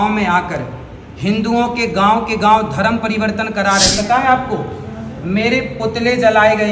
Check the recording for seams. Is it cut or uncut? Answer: cut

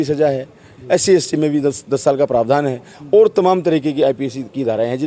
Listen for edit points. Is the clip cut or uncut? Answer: uncut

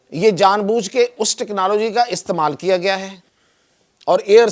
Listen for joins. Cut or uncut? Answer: uncut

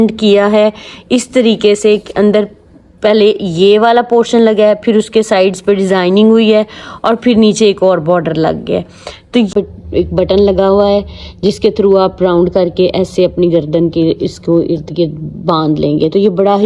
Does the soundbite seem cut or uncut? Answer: cut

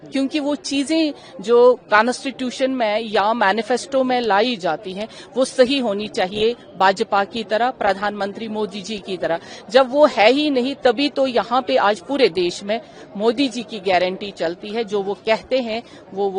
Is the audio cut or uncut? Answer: uncut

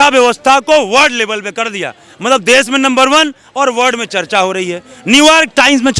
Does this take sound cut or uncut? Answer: uncut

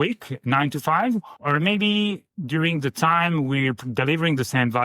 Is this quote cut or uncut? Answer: cut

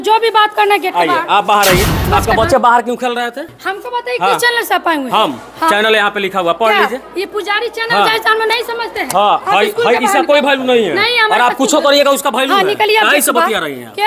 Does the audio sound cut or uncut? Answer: cut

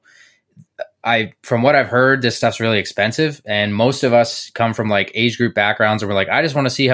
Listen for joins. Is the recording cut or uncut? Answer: uncut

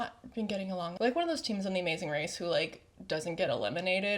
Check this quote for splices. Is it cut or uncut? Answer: cut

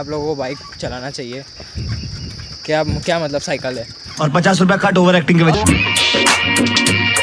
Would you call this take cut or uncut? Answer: uncut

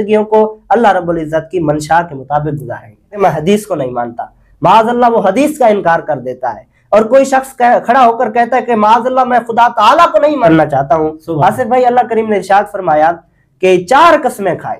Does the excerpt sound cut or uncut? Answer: cut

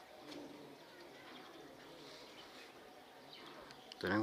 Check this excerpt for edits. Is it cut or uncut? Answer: uncut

